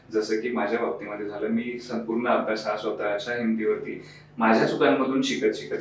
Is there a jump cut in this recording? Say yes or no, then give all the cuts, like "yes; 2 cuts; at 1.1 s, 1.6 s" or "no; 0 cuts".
no; 0 cuts